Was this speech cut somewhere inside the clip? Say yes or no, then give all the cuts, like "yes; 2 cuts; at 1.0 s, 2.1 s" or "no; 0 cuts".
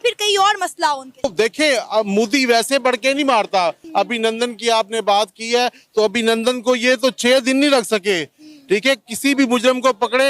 yes; 2 cuts; at 1.3 s, 3.8 s